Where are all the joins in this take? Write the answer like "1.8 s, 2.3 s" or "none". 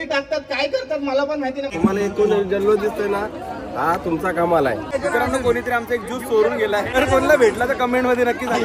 1.7 s, 4.9 s, 7.0 s